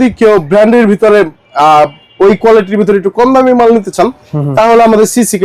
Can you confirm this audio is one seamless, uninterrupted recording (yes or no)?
yes